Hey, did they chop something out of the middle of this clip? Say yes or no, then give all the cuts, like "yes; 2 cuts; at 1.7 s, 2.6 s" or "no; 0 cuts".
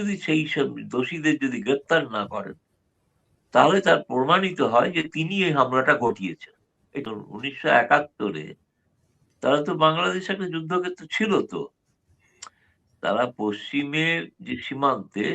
yes; 1 cut; at 7.0 s